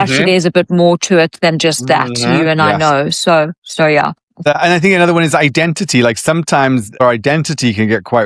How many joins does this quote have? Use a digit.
2